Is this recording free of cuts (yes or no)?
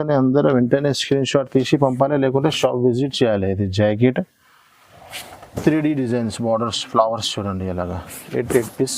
yes